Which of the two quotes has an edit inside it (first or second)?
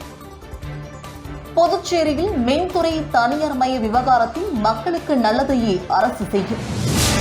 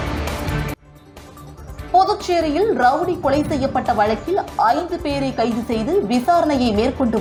first